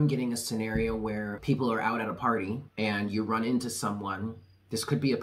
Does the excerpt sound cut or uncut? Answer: cut